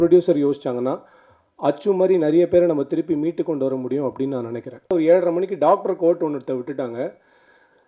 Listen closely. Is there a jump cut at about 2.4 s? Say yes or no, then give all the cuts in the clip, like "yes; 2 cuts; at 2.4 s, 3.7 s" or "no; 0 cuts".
no; 1 cut; at 4.9 s